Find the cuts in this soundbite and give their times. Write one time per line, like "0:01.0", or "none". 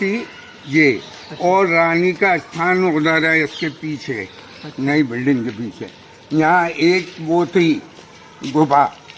none